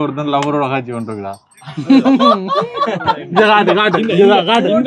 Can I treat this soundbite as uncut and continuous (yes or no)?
yes